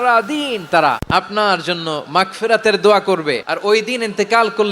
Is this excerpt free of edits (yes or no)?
no